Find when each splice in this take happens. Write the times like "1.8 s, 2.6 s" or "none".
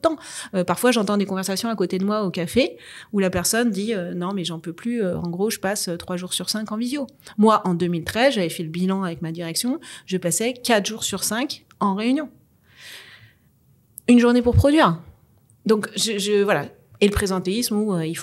none